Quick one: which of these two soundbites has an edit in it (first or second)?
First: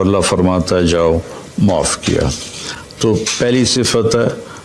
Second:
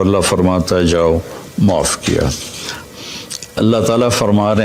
second